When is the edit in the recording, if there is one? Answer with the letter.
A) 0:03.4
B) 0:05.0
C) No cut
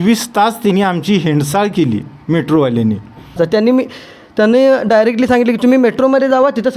A